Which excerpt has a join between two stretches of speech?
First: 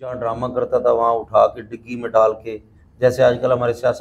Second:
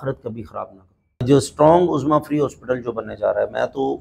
second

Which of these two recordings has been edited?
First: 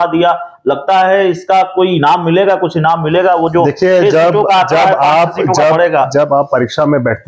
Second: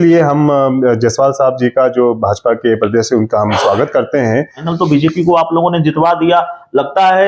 second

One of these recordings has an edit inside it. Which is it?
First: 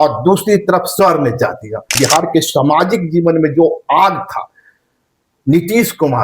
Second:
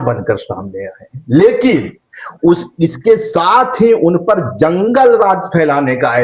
first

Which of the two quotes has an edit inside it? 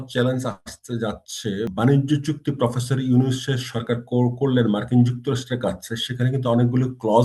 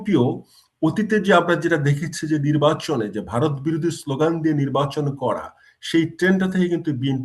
first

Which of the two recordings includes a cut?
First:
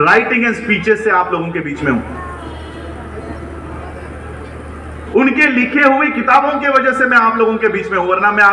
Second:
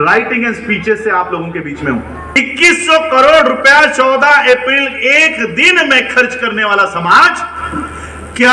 second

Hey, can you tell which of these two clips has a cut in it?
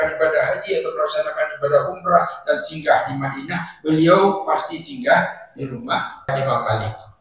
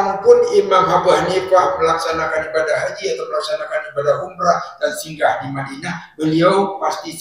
first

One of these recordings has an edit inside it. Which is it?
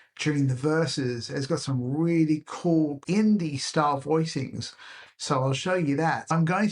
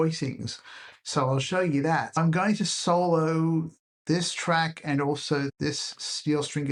first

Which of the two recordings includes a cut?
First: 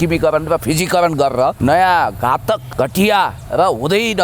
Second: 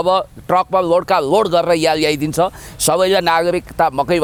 first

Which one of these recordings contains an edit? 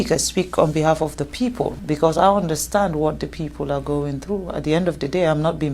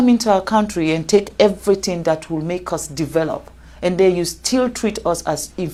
first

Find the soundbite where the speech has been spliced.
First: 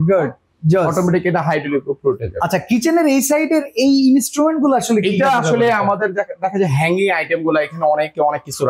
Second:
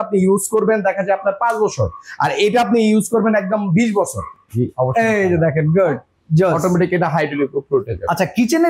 second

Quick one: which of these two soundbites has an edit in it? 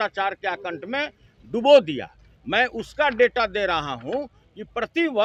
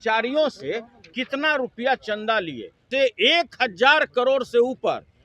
second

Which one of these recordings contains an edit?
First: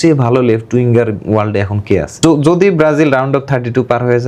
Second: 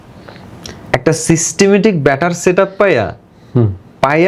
first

